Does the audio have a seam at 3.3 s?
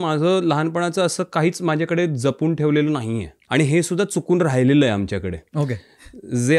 yes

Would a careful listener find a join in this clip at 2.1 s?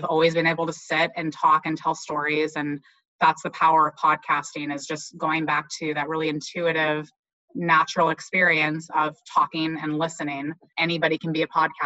no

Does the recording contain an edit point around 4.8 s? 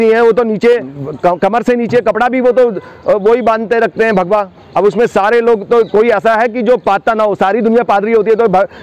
no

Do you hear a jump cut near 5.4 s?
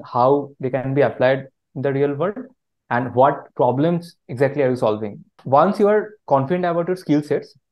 yes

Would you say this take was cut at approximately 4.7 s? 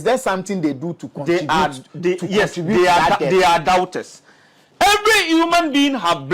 yes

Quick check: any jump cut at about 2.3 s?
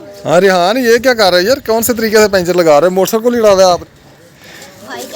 no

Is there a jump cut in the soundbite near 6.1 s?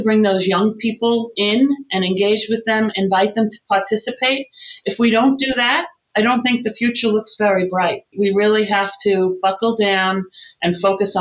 no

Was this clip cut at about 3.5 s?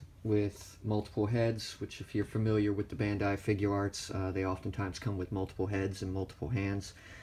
no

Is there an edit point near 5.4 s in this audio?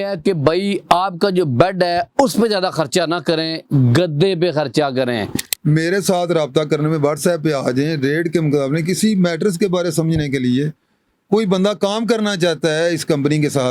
yes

